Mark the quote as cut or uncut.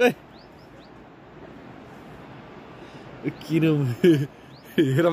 uncut